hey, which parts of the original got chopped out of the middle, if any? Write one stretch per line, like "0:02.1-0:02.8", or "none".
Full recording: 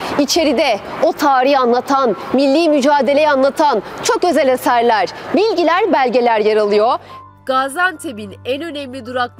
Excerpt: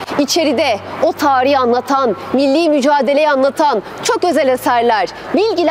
none